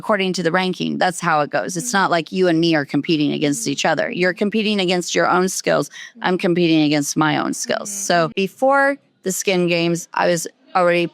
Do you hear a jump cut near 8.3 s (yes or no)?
yes